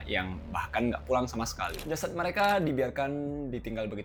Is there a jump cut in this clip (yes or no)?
no